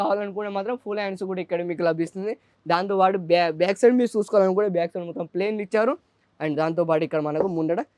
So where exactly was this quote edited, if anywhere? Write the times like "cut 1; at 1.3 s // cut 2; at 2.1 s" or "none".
none